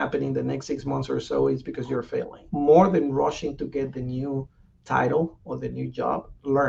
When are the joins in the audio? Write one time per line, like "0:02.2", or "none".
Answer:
none